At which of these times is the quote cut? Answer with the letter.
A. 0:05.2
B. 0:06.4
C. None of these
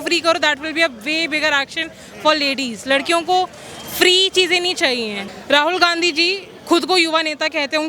A